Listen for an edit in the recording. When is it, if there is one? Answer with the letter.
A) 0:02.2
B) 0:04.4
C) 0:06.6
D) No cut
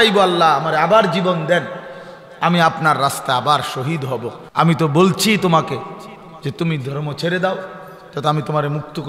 B